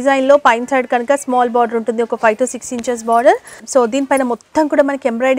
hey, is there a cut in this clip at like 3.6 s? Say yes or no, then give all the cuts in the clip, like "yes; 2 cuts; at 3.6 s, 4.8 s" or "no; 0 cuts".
yes; 1 cut; at 3.6 s